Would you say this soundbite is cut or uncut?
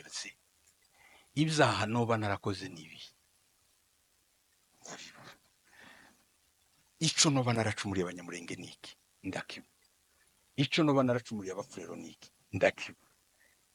uncut